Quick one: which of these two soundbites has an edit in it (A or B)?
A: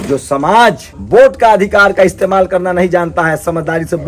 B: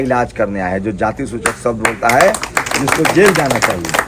A